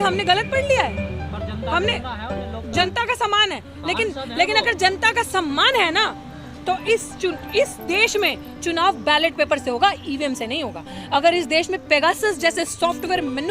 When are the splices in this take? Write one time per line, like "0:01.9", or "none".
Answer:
0:02.9